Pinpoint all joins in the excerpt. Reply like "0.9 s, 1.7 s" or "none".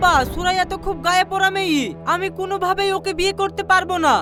none